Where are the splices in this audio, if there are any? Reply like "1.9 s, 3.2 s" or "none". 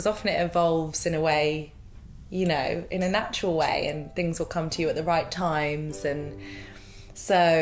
none

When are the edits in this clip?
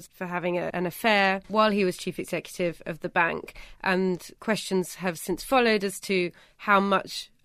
1.2 s, 4.3 s

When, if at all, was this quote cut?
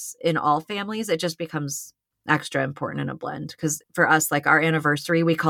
3.8 s

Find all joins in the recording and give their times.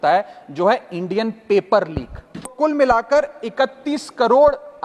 2.5 s

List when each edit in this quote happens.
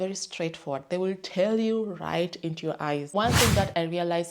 3.1 s

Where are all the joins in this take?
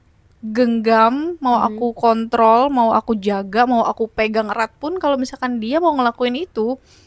none

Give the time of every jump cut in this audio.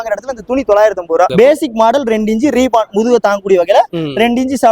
1.3 s

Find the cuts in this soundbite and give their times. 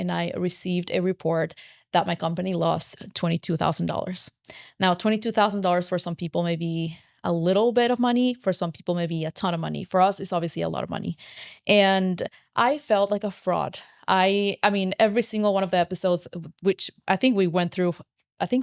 none

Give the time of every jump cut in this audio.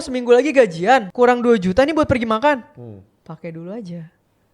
1.1 s

